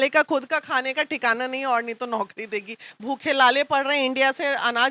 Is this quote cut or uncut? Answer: uncut